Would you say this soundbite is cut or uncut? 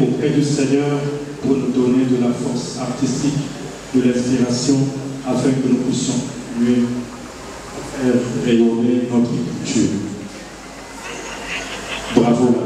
uncut